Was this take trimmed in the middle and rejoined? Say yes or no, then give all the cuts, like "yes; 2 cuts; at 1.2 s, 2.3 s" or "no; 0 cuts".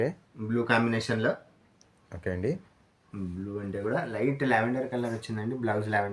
no; 0 cuts